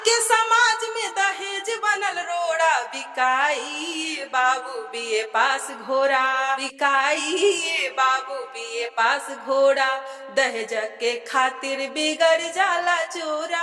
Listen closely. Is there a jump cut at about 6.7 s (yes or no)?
yes